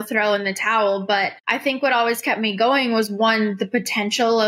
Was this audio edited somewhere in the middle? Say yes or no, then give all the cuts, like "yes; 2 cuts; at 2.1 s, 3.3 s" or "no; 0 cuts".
yes; 1 cut; at 1.4 s